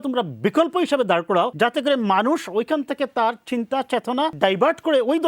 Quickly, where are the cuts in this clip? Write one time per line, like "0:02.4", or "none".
0:01.5
0:04.3